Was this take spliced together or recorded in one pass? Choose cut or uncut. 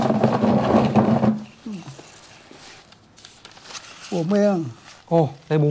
cut